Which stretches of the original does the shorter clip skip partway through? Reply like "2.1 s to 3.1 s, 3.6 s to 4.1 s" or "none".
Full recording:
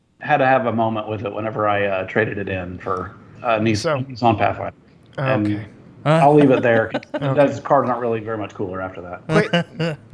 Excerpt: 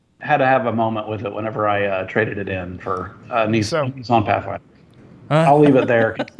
3.1 s to 3.3 s, 5.1 s to 5.7 s

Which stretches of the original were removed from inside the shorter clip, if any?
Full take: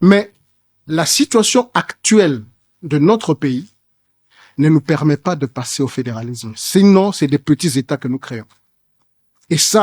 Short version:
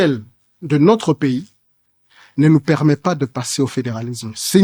none

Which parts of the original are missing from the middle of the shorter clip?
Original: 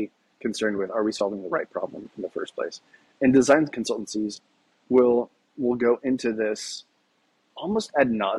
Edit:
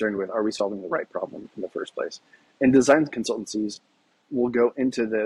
4.7 s to 5.4 s

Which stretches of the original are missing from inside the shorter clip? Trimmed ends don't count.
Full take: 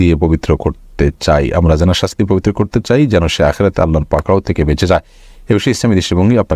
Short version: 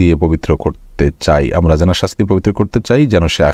none

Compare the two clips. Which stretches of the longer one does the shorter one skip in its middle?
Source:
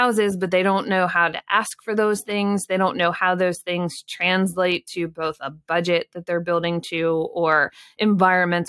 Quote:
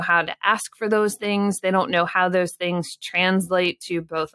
none

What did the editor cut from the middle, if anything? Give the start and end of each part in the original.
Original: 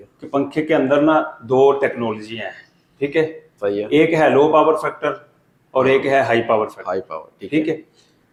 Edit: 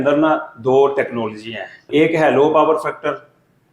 2.7 s to 3.8 s

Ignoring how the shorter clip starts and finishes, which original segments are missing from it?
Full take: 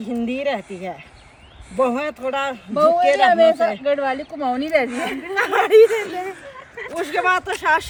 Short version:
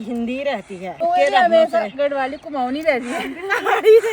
1.0 s to 2.9 s

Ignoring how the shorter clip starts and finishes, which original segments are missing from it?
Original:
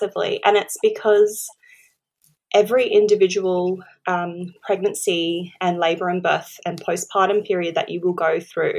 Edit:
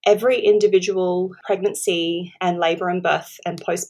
3.8 s to 4.6 s

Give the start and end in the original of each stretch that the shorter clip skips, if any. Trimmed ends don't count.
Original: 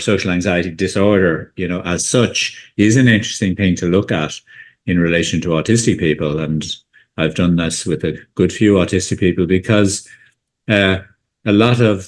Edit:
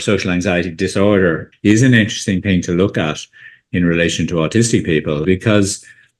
1.5 s to 2.6 s, 6.4 s to 9.5 s

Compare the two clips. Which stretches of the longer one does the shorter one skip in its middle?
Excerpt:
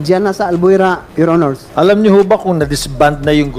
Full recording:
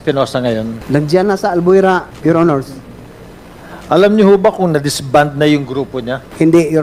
2.1 s to 3.2 s

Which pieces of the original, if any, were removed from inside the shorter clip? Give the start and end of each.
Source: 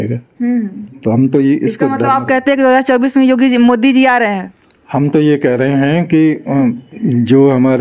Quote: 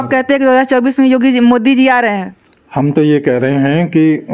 none

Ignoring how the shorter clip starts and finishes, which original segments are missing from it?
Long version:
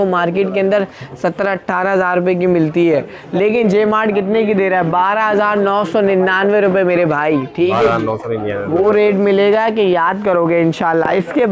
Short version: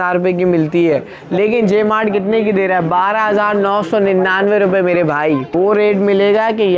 7.5 s to 8.6 s

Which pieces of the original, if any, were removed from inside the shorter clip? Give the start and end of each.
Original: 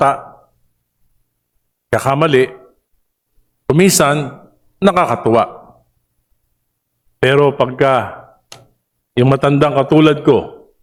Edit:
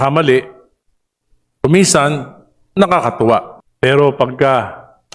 5.7 s to 7.0 s

